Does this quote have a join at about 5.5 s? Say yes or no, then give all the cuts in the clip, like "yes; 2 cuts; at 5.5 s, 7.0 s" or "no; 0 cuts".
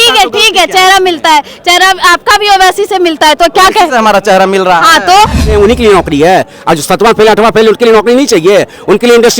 yes; 1 cut; at 5.5 s